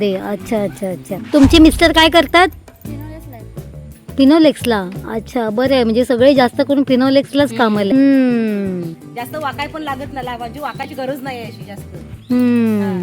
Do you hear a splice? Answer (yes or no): yes